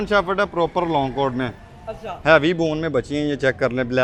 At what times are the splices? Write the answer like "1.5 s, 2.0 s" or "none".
none